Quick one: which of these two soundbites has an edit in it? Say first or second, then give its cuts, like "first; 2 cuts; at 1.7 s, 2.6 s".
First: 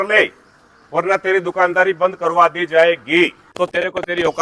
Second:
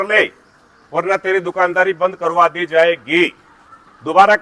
first; 1 cut; at 3.5 s